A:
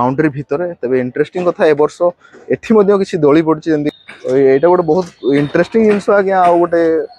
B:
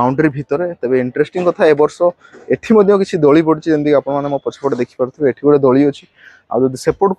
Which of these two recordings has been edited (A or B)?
A